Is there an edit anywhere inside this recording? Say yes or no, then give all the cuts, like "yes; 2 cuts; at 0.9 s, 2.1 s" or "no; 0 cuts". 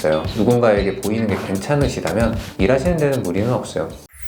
no; 0 cuts